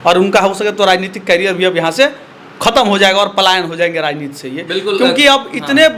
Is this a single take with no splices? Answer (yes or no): yes